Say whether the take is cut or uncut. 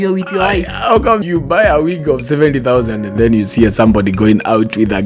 uncut